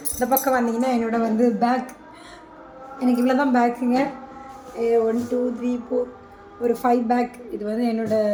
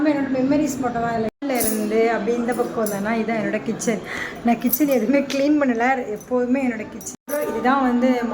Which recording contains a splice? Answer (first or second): second